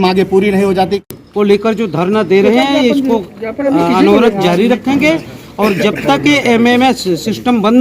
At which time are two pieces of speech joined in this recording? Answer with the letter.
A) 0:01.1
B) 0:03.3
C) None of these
A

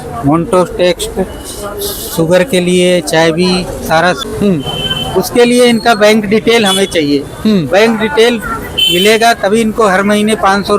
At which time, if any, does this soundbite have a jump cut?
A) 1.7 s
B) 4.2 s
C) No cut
B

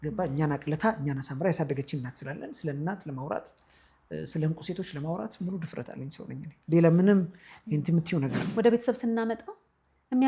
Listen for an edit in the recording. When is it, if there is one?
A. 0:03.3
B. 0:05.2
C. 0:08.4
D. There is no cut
C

